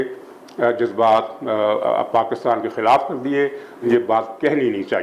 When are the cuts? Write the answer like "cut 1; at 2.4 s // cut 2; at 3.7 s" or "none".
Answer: cut 1; at 3.8 s